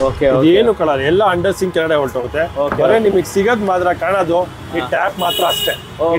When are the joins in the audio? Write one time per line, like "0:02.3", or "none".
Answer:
none

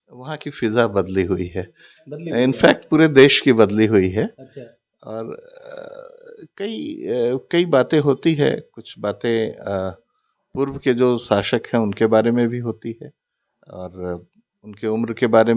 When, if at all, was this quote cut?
none

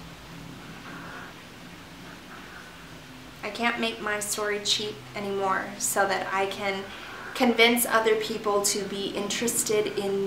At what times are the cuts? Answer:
none

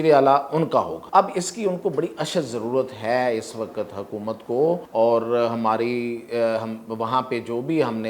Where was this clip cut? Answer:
0:01.0
0:04.9

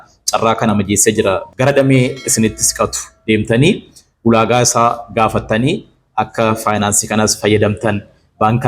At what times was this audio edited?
0:01.4

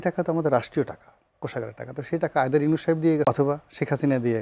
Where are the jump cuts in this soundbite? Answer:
0:03.3

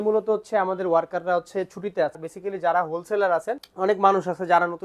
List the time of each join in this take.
0:02.2
0:03.6

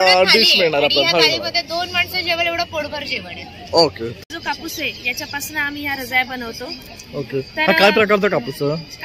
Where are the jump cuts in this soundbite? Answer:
0:04.2

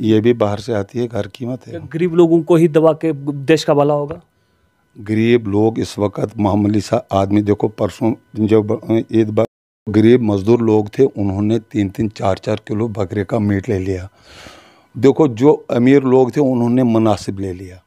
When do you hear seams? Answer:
0:09.9

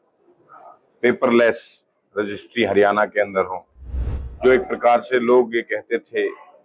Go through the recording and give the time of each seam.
none

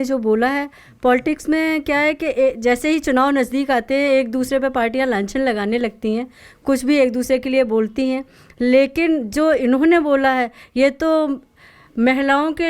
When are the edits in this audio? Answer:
none

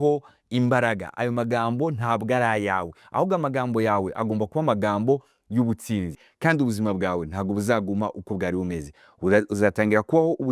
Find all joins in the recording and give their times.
0:06.2

